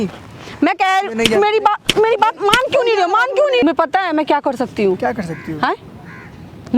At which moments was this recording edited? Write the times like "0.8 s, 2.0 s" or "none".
3.6 s